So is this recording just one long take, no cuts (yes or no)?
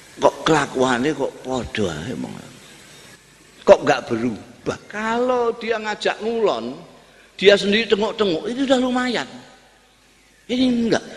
no